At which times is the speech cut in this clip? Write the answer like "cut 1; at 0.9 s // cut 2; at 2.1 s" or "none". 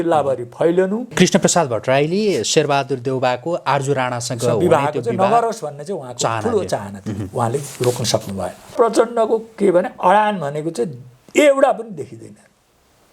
cut 1; at 1.1 s // cut 2; at 8.7 s